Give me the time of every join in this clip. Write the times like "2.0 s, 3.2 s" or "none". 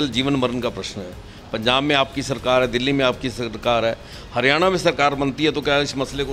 none